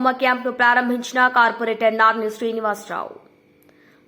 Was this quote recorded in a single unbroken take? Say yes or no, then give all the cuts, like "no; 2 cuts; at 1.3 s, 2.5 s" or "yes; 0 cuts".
yes; 0 cuts